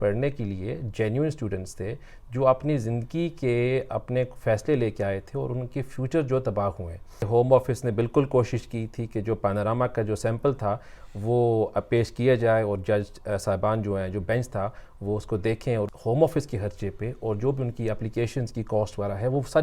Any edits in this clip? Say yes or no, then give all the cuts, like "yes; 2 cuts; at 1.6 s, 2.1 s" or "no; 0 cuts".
yes; 2 cuts; at 7.3 s, 15.9 s